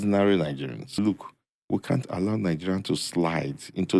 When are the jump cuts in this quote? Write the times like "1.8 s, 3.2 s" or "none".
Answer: 1.0 s